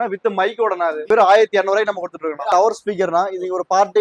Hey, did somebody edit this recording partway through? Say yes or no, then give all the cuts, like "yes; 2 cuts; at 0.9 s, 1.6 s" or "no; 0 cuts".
yes; 2 cuts; at 1.1 s, 2.5 s